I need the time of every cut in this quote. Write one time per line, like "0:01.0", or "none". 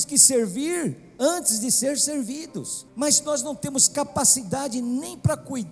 0:02.8